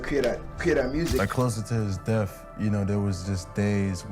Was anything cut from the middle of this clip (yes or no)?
yes